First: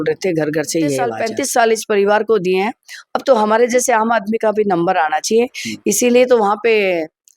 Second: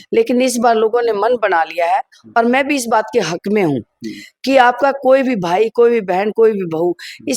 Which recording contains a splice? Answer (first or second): first